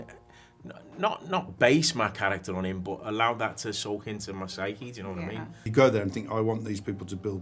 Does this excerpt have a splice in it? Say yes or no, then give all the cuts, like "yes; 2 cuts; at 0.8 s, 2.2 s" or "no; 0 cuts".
yes; 1 cut; at 5.6 s